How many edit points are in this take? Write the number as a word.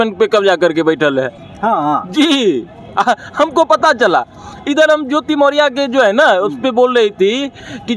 zero